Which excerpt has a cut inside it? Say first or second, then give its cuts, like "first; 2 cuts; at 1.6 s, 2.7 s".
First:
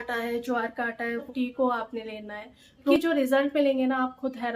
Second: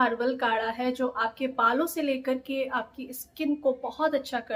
first; 2 cuts; at 1.3 s, 2.9 s